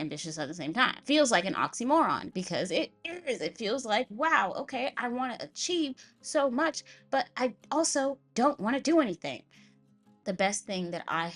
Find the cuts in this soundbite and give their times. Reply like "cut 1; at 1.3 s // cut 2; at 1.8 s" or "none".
cut 1; at 10.1 s